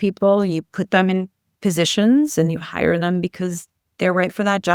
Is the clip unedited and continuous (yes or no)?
yes